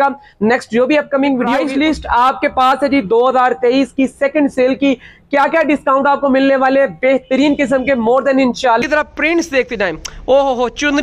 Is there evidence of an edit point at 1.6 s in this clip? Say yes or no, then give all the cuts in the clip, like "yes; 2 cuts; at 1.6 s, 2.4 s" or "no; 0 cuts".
yes; 2 cuts; at 1.6 s, 8.8 s